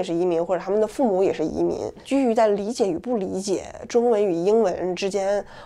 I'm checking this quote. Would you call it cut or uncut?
cut